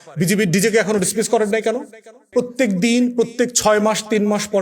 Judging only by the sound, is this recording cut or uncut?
cut